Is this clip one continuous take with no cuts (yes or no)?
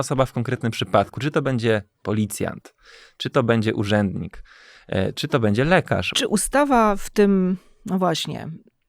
no